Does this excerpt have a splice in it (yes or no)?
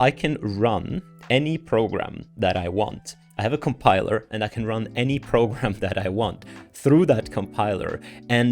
no